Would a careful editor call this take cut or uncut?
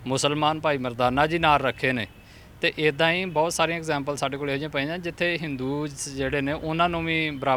uncut